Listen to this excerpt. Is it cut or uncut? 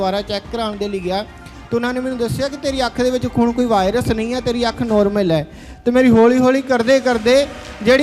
uncut